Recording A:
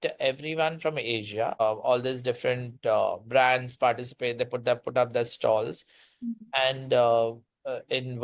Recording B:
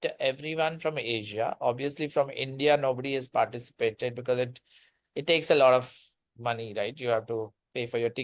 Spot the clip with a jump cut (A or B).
A